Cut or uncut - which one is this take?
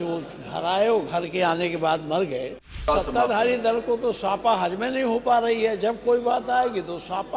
cut